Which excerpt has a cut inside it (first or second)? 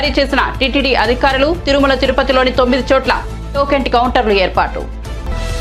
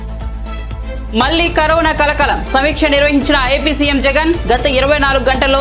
second